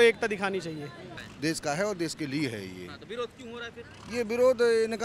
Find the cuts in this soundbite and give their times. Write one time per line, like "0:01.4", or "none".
0:01.0